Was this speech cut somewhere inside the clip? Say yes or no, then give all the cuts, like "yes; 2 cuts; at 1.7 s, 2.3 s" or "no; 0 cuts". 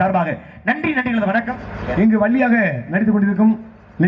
yes; 1 cut; at 1.7 s